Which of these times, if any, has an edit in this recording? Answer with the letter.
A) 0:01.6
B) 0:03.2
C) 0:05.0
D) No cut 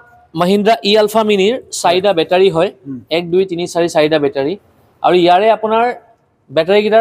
D